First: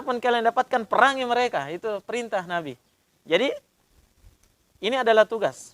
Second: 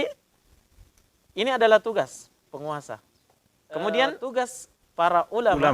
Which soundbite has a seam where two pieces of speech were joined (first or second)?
second